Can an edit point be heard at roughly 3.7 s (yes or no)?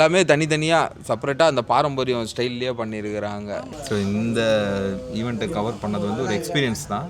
yes